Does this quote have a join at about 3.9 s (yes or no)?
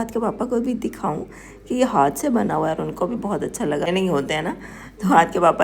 yes